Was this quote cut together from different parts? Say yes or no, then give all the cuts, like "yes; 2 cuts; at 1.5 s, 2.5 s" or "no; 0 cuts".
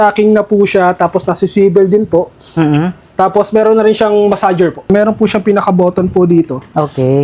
yes; 1 cut; at 4.9 s